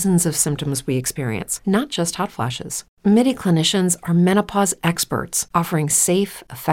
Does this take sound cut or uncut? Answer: uncut